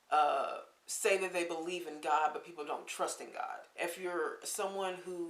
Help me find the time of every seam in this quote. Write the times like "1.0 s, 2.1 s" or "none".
3.7 s